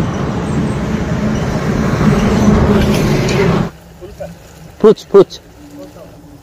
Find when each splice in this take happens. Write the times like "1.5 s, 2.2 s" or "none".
3.6 s